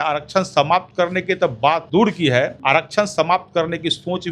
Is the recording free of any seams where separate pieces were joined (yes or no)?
no